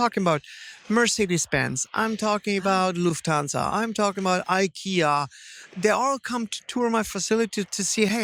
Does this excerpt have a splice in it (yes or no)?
no